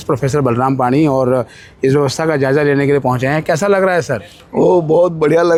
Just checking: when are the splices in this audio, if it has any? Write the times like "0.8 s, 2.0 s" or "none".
none